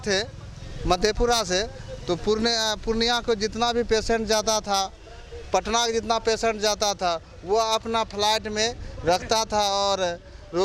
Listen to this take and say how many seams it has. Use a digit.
0